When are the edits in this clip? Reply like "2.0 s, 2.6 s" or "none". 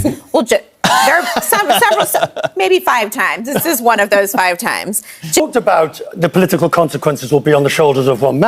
5.4 s